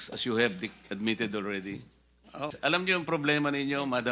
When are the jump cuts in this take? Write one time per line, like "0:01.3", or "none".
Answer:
0:02.5

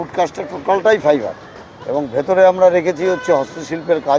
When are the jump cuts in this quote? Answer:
none

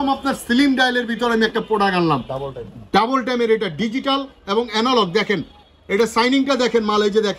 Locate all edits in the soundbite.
none

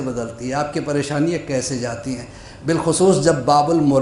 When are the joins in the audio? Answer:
none

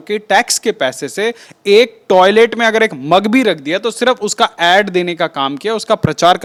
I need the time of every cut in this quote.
none

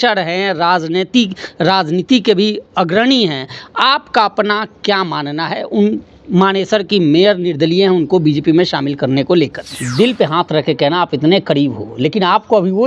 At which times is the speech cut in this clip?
0:09.7

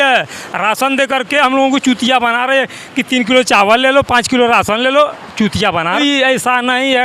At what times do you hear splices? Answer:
0:06.0

